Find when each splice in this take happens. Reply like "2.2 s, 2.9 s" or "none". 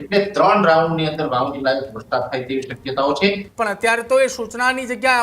3.5 s